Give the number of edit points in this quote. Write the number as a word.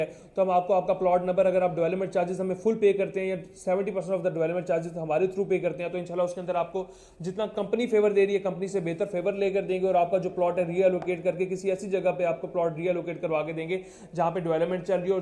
zero